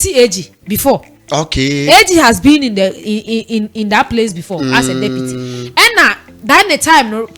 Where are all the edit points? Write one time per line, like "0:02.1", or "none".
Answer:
none